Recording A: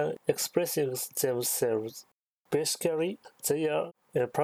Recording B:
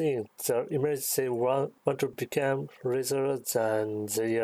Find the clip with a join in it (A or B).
A